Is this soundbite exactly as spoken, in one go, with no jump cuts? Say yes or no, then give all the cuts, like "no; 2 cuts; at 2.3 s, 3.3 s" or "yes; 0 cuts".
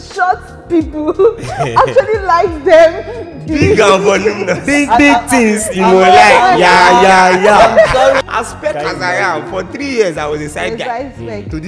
no; 1 cut; at 8.2 s